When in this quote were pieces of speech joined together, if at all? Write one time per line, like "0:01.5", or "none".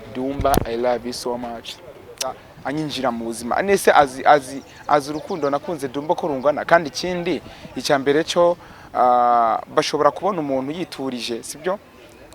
0:02.5